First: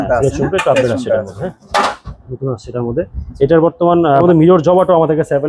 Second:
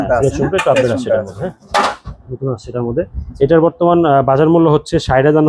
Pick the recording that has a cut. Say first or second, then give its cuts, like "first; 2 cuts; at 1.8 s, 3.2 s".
first; 1 cut; at 4.2 s